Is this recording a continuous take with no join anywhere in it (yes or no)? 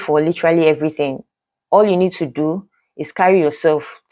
yes